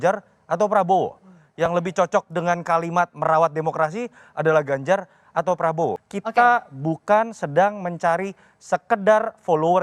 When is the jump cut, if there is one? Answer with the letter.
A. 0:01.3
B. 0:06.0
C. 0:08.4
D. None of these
B